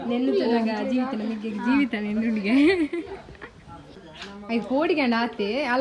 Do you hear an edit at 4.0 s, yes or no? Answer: yes